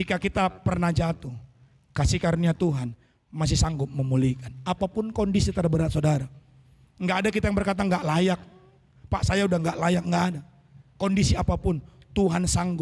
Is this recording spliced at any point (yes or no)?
no